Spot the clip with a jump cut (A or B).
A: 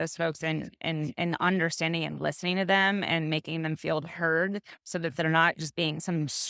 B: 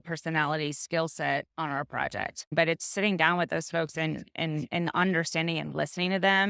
B